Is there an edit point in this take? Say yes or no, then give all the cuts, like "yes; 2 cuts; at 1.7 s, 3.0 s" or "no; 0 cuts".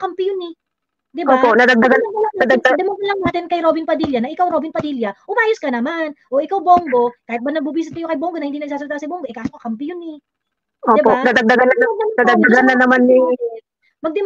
no; 0 cuts